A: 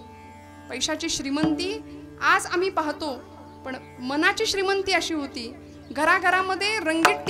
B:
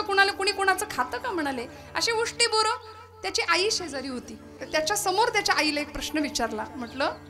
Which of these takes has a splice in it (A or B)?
B